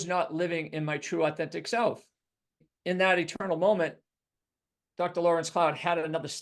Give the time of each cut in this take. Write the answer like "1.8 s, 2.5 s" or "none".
2.7 s